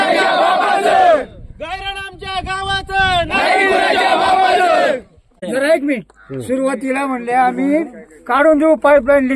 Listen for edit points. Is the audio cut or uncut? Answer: cut